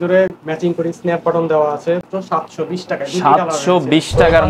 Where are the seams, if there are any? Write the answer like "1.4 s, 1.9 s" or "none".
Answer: 2.1 s